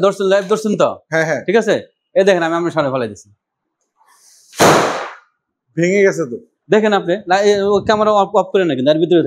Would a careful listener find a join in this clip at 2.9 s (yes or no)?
no